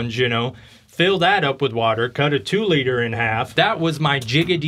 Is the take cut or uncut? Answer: cut